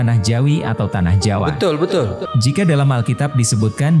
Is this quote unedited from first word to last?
no; 1 cut; at 2.3 s

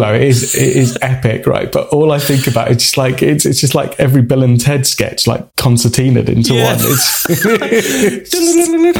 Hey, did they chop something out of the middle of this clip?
no; 0 cuts

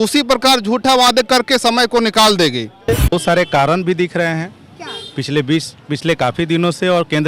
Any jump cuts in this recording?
yes; 1 cut; at 3.1 s

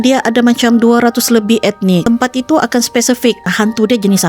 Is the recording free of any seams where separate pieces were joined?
no; 2 cuts; at 2.0 s, 3.5 s

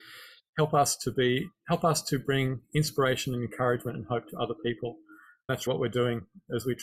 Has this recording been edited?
yes; 1 cut; at 5.7 s

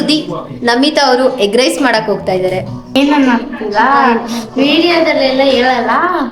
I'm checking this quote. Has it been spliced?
yes; 1 cut; at 2.9 s

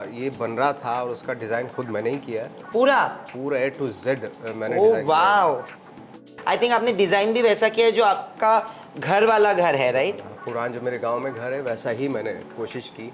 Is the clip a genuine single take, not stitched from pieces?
no; 1 cut; at 6.3 s

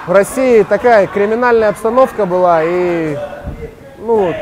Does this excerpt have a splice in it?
no; 0 cuts

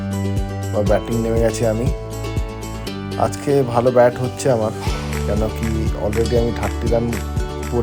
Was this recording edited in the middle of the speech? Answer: no; 0 cuts

